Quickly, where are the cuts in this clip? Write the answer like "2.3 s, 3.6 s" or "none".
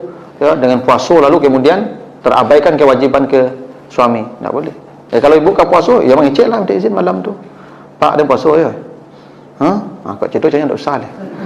none